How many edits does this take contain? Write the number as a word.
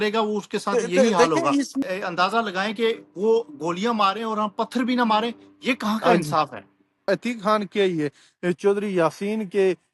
two